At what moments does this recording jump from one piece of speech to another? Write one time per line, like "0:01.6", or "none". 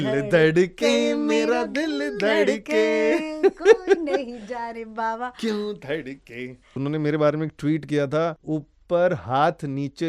0:06.8
0:08.4

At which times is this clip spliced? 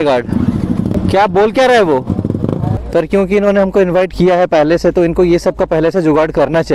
0:00.9
0:02.7

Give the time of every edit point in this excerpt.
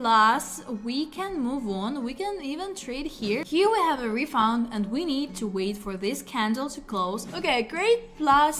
0:03.4
0:07.3

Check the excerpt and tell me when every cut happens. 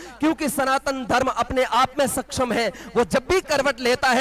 none

